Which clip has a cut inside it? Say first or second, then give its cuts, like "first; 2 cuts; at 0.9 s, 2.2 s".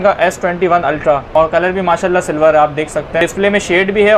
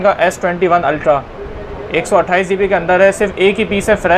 first; 2 cuts; at 1.4 s, 3.2 s